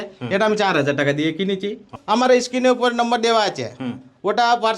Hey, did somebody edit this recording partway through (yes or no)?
yes